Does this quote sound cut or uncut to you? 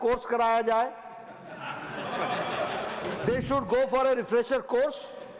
cut